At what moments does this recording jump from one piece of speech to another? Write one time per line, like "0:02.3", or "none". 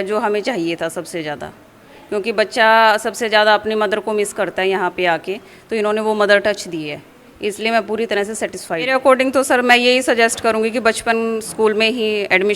0:08.9